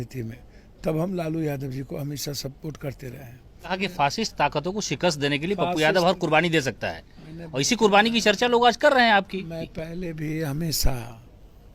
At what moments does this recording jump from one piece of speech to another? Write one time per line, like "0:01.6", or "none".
0:03.8